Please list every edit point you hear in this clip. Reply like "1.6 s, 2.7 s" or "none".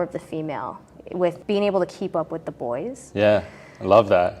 1.4 s